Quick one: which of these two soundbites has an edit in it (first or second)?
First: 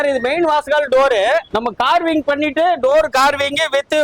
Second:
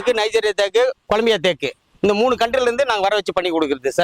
first